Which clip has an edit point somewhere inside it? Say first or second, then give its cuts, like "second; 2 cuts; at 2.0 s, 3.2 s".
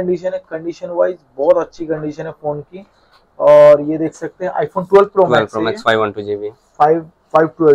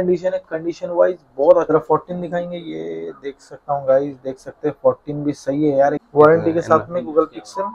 second; 2 cuts; at 1.7 s, 6.0 s